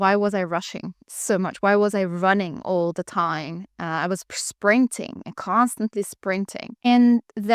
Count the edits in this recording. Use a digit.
0